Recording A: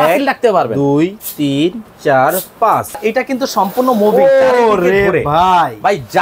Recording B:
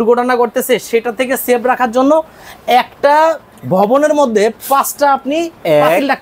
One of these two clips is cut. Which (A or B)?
A